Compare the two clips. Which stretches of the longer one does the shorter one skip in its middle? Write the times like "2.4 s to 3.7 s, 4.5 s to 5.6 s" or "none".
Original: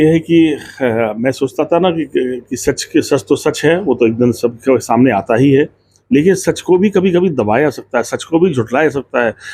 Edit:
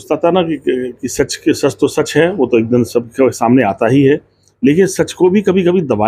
none